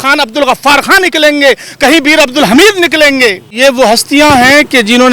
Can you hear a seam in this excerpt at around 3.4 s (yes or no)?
yes